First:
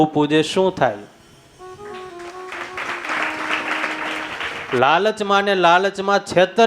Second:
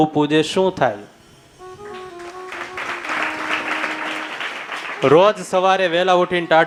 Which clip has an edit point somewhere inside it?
first; 1 cut; at 4.6 s

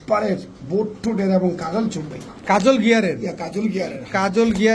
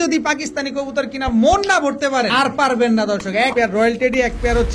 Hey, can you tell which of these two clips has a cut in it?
second; 2 cuts; at 2.3 s, 3.5 s

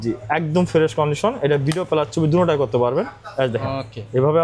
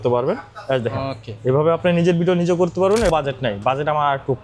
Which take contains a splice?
second; 1 cut; at 3.1 s

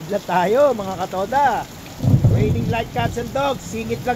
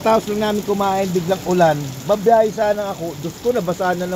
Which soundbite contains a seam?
first; 1 cut; at 1.8 s

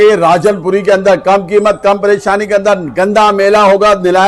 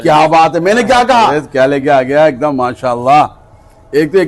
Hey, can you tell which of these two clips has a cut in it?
second; 1 cut; at 1.4 s

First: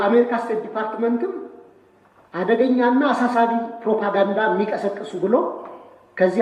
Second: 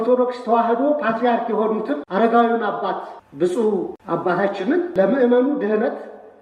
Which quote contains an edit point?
second; 4 cuts; at 2.0 s, 3.2 s, 4.0 s, 4.9 s

